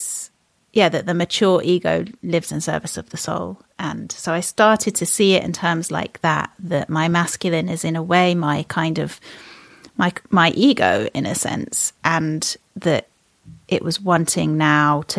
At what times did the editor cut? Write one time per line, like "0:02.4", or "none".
none